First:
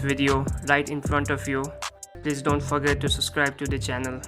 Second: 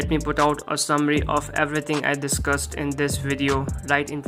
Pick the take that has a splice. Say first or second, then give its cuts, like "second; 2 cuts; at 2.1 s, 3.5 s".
first; 1 cut; at 2.1 s